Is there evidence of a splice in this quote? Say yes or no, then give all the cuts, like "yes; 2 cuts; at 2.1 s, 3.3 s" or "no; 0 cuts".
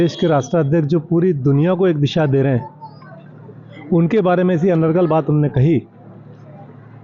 no; 0 cuts